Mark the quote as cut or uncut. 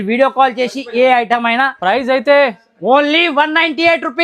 uncut